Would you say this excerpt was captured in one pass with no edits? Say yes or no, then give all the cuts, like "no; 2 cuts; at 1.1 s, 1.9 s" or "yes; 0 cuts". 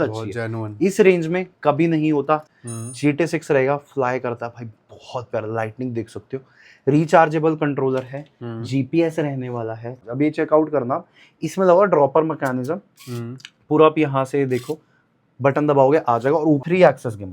no; 3 cuts; at 2.5 s, 10.0 s, 16.6 s